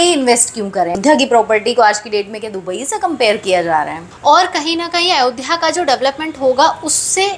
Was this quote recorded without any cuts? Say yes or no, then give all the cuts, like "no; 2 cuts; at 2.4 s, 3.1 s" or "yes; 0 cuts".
no; 2 cuts; at 1.0 s, 4.0 s